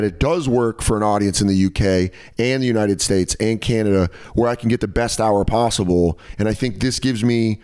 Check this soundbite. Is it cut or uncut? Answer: cut